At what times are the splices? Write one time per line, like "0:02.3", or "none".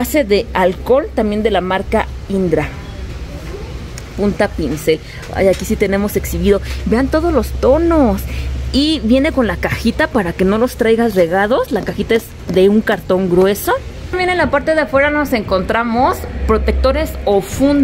0:14.1